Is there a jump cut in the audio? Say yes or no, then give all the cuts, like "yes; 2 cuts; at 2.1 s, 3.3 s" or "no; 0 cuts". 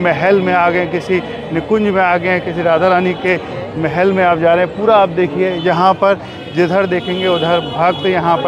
no; 0 cuts